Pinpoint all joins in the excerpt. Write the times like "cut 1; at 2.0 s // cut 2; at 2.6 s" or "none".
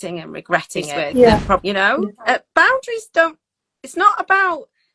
cut 1; at 1.7 s